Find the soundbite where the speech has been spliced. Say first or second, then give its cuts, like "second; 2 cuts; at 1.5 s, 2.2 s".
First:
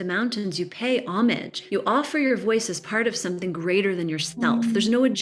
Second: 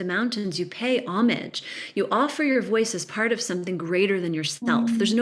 first; 1 cut; at 1.5 s